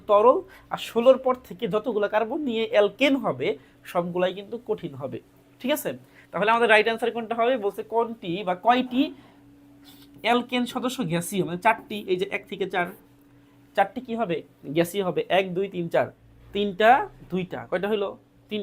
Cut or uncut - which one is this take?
cut